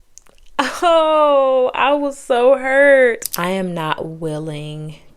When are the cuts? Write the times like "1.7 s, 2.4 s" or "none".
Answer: 3.2 s